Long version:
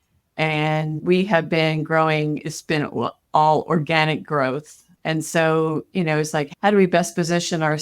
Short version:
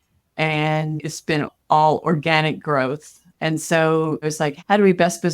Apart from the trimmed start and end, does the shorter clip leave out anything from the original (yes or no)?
yes